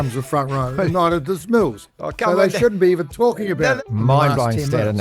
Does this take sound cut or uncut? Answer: cut